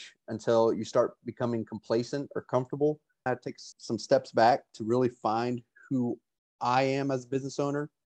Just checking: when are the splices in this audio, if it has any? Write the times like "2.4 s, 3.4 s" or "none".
3.5 s